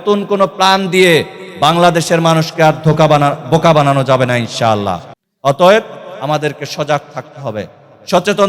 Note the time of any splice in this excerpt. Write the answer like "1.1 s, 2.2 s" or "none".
none